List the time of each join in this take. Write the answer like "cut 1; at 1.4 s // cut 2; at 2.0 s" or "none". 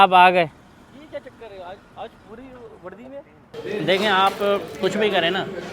cut 1; at 3.5 s